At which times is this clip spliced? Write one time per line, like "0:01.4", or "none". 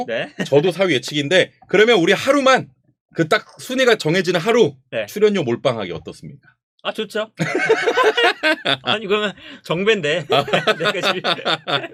none